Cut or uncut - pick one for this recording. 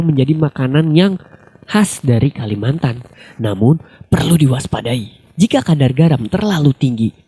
cut